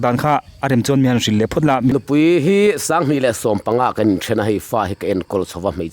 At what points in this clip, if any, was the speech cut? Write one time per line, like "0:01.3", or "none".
0:01.9